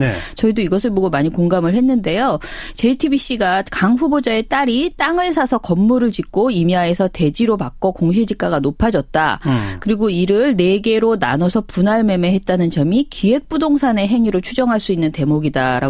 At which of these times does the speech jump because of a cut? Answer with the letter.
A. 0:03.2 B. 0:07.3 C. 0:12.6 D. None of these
B